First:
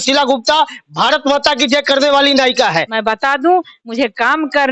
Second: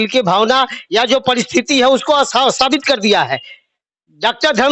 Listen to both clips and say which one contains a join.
first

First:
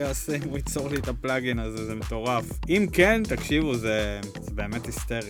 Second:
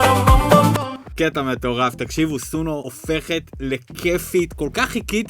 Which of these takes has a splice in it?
second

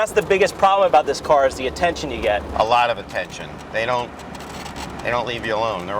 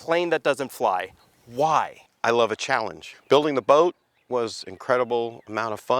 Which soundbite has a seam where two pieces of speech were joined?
second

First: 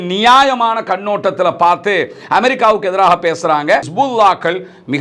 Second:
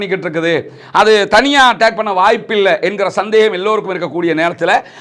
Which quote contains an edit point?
first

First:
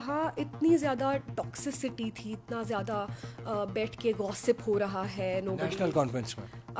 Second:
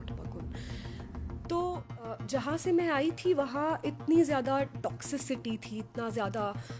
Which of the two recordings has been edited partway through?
second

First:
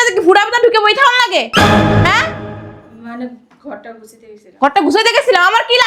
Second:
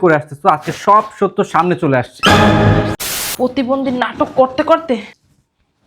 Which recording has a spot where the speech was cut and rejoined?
second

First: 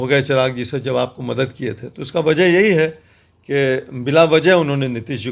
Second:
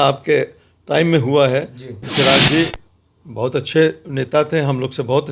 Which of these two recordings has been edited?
second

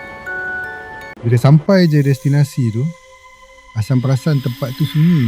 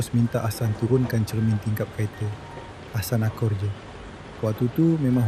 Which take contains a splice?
first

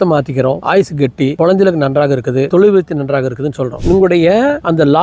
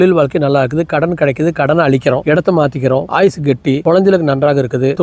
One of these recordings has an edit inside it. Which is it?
first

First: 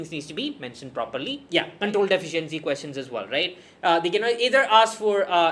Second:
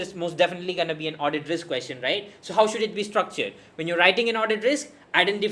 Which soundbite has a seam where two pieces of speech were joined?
first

